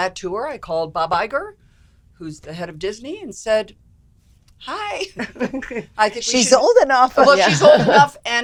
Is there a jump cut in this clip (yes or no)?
no